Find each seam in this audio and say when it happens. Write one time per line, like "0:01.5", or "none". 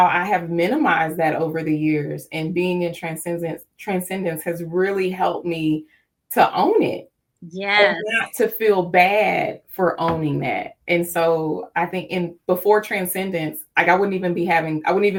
none